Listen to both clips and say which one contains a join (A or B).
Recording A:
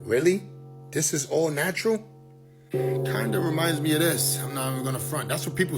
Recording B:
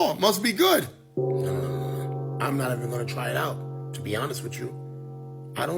A